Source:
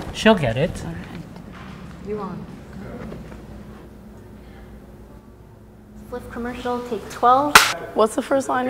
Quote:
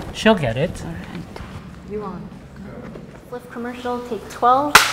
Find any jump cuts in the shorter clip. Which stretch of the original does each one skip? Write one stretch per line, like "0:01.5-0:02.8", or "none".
0:01.4-0:01.5
0:03.3-0:06.0